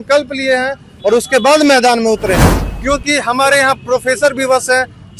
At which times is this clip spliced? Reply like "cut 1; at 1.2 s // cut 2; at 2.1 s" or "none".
cut 1; at 2.7 s